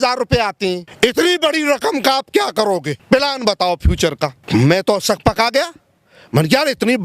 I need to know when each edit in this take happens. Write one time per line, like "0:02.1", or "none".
0:00.9
0:03.0
0:04.4